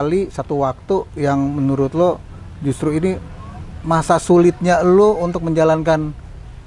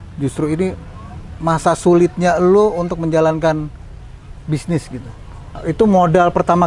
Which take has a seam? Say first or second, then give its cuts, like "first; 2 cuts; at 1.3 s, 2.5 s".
second; 1 cut; at 5.6 s